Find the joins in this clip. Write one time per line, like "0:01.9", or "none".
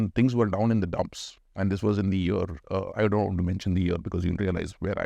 none